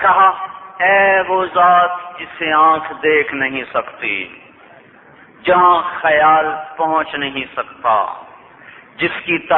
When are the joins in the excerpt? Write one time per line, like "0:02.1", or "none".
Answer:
0:04.9